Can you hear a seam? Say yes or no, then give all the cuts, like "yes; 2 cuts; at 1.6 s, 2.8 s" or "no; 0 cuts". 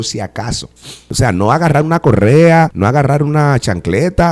yes; 2 cuts; at 1.1 s, 2.7 s